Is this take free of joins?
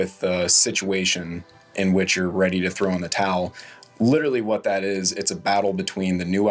yes; 0 cuts

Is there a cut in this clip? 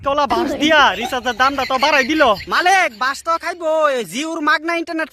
no; 0 cuts

